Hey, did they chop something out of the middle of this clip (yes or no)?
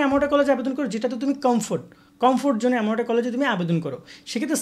no